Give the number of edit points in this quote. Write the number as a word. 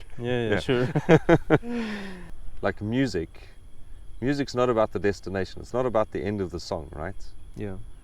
one